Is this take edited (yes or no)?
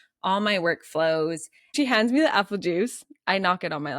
yes